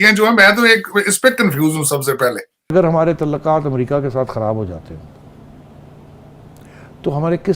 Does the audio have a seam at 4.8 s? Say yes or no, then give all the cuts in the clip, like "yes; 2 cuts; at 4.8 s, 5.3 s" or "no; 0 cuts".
no; 1 cut; at 2.5 s